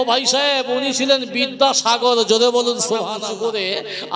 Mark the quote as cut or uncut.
cut